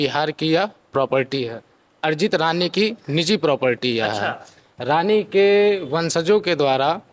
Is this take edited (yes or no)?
no